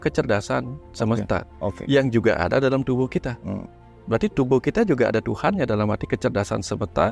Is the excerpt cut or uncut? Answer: uncut